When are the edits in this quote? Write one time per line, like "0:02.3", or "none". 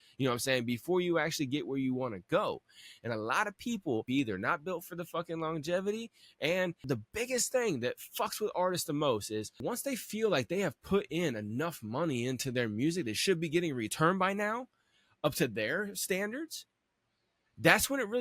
0:04.1
0:06.8
0:09.6